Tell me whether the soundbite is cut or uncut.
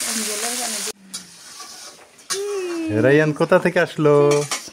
cut